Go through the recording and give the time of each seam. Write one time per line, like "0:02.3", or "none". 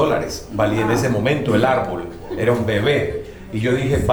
none